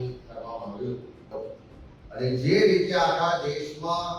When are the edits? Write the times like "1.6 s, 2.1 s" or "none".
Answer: 1.2 s